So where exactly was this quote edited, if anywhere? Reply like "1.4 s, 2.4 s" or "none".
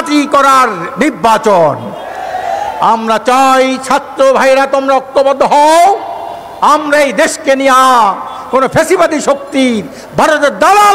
none